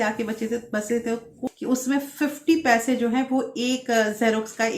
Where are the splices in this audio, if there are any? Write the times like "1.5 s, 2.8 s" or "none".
1.4 s